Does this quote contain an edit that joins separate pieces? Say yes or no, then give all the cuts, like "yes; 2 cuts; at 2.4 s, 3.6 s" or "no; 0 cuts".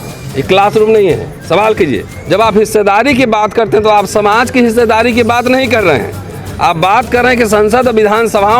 yes; 1 cut; at 2.1 s